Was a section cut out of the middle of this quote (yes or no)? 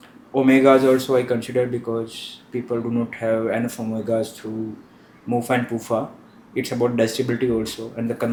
no